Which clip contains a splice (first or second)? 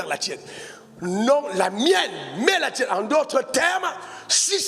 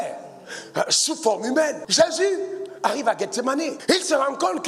second